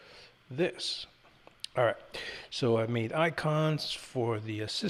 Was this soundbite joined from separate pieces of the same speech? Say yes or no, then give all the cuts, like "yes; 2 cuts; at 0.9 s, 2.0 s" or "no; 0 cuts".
no; 0 cuts